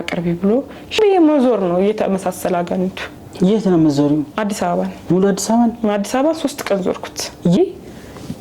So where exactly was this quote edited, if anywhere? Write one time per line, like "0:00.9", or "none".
0:01.0
0:07.6

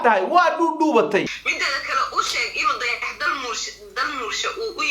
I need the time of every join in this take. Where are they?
0:01.4

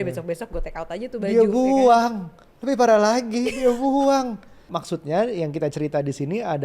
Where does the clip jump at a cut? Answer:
0:04.7

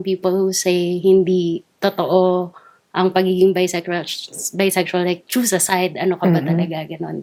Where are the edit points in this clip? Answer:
none

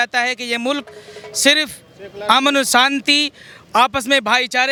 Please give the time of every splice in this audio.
none

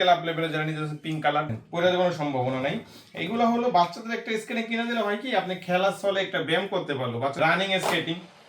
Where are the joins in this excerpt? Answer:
0:01.6
0:07.4

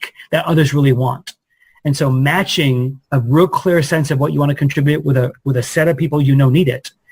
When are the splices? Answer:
none

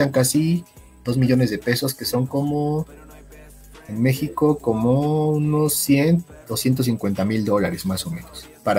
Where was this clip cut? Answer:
none

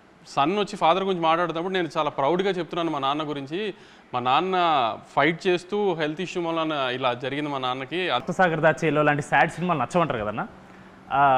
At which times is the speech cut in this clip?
0:08.2

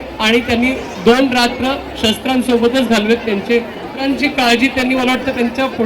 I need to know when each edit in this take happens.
0:03.9

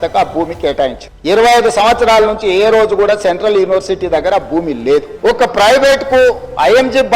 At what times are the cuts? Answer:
0:05.1

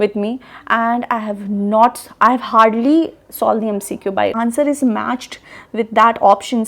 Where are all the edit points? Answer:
0:04.3

